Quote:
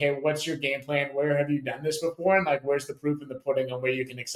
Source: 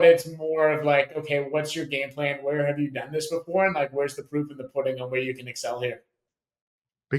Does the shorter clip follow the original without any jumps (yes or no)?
yes